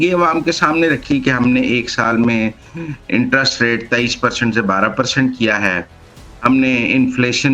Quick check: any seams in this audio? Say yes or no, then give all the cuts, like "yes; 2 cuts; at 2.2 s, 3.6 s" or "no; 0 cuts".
no; 0 cuts